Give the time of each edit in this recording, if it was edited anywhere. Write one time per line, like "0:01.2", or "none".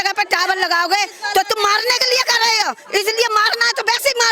none